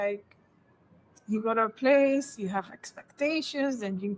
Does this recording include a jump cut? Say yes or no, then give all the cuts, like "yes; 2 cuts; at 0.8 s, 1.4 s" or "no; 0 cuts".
no; 0 cuts